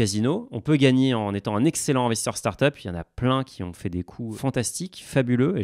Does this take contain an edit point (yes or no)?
yes